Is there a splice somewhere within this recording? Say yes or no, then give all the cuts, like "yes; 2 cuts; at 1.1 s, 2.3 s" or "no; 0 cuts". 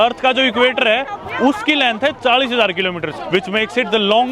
yes; 1 cut; at 3.2 s